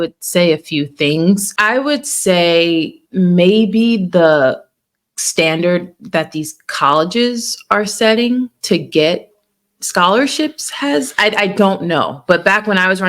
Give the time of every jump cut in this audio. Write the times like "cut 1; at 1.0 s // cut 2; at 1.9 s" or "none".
cut 1; at 1.5 s